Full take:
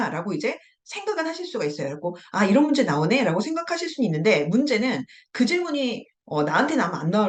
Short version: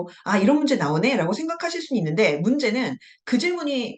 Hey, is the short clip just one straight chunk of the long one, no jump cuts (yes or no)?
yes